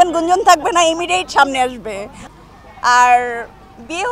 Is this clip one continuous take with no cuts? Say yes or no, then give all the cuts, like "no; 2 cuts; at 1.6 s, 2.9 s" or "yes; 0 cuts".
no; 1 cut; at 2.1 s